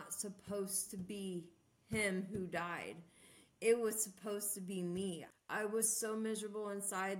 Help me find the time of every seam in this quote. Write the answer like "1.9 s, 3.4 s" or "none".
5.3 s